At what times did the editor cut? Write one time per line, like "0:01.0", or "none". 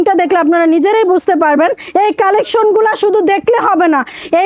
0:01.8